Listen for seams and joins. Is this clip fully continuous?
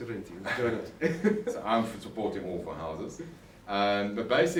yes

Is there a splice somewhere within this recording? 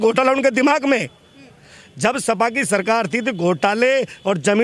no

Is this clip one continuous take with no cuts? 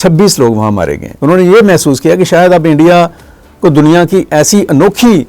no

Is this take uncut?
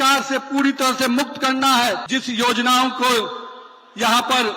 no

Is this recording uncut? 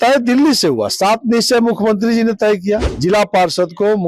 no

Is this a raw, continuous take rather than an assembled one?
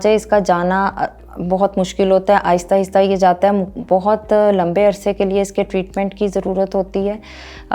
yes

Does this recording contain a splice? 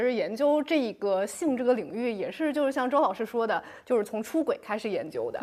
no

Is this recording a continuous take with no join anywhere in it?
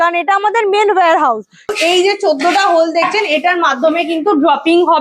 no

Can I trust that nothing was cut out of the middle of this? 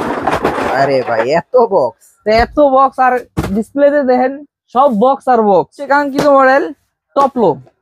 no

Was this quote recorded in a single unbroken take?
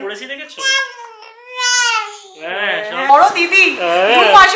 no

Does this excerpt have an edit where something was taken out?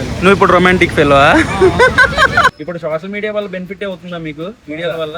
yes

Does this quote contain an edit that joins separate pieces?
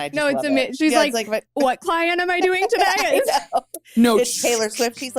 no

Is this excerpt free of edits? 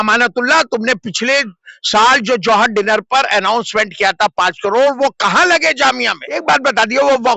no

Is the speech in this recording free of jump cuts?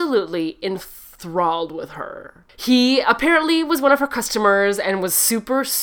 yes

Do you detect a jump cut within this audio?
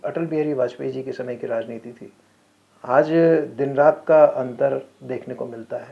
no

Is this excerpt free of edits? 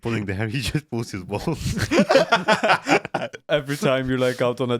no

